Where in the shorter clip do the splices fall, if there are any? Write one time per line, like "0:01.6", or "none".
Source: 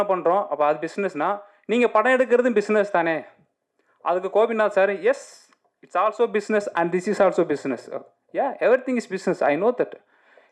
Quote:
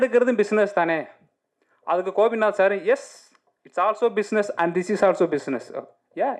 none